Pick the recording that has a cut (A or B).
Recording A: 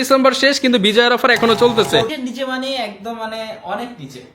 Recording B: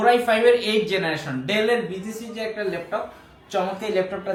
A